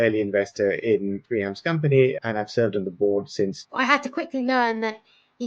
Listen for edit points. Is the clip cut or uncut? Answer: cut